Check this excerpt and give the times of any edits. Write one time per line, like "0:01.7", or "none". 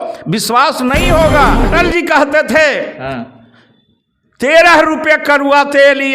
0:01.6

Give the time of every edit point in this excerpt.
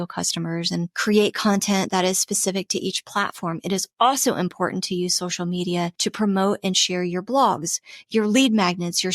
0:00.9
0:05.9

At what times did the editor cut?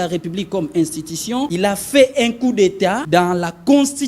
0:01.5
0:03.0

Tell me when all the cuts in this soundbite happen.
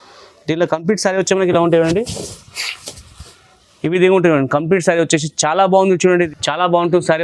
0:06.3

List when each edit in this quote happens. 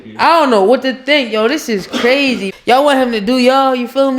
0:02.5

